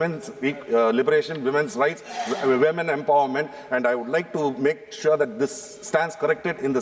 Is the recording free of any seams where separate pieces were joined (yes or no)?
yes